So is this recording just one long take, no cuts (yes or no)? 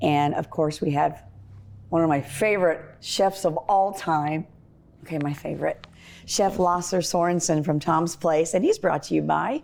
yes